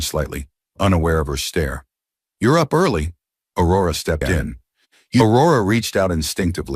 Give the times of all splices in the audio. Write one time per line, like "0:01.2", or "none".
0:05.2